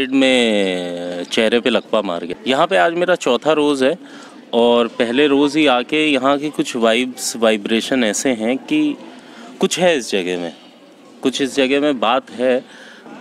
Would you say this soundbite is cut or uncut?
cut